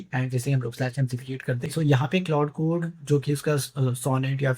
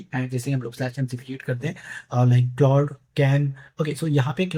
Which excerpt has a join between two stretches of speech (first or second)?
first